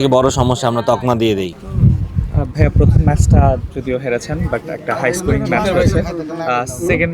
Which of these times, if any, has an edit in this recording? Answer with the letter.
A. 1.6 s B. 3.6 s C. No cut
A